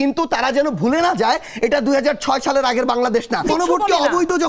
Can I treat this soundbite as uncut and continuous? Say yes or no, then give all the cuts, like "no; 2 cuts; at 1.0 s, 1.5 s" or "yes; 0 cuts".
no; 1 cut; at 3.5 s